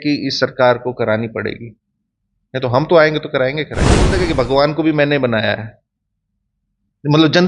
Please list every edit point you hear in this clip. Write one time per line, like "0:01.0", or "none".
0:04.2